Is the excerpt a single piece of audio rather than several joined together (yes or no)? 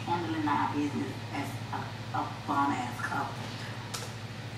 yes